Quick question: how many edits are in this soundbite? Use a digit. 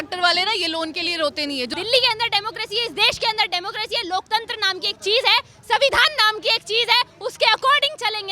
1